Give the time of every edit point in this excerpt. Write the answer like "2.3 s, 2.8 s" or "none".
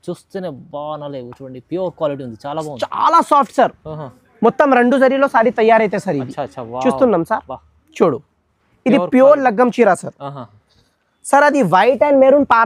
none